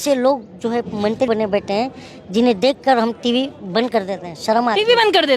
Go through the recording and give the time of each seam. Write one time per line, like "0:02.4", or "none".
0:01.3